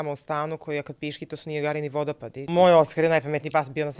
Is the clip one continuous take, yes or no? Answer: no